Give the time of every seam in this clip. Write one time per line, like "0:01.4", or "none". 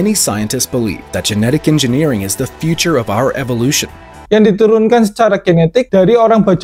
0:04.2